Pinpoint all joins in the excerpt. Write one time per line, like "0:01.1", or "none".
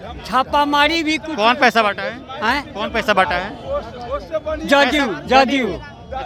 none